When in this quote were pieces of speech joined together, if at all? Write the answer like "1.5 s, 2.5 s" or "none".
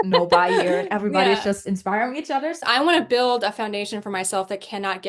2.6 s